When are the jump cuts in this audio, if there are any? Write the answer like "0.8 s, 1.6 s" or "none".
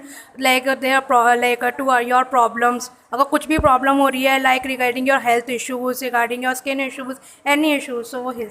none